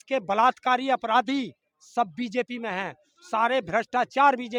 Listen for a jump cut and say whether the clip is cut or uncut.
uncut